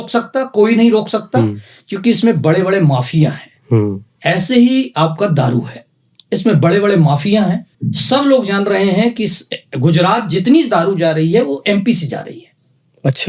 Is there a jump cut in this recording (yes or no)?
no